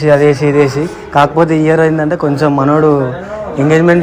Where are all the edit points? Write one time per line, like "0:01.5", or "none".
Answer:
none